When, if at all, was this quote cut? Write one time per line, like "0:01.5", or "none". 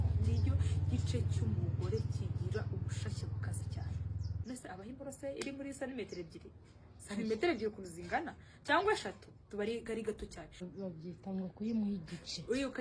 0:04.4
0:10.7